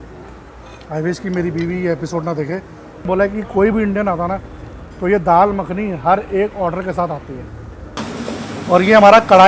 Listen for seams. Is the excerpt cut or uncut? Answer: cut